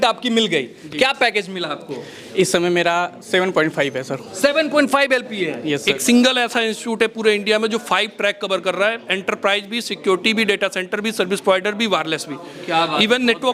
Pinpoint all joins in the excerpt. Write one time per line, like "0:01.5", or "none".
0:05.8